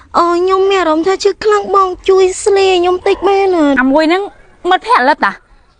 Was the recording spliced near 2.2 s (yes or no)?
no